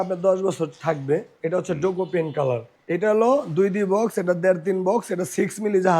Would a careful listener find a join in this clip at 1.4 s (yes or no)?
no